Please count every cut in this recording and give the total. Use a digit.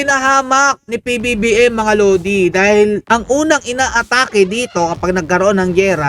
1